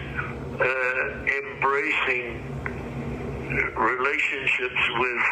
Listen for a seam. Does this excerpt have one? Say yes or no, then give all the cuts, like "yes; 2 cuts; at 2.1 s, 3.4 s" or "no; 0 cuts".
no; 0 cuts